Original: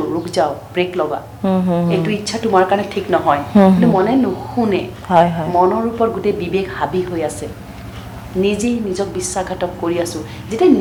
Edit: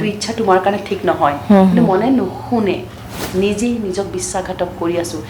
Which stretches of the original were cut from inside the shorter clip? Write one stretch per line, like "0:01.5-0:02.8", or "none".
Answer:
0:04.9-0:07.9